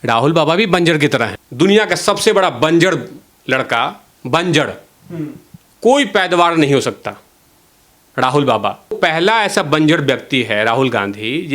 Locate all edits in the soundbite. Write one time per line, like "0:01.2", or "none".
0:01.4
0:09.0